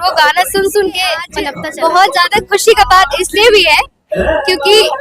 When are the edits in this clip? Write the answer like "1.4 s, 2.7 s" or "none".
1.4 s

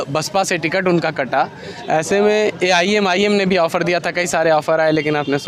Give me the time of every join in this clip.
none

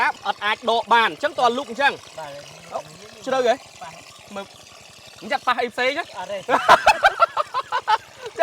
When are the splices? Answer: none

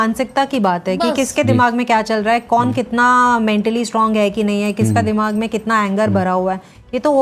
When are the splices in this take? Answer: none

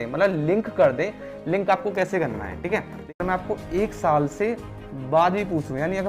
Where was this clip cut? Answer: 3.2 s

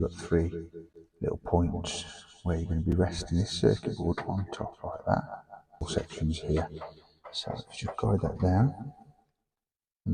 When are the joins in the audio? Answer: 5.9 s

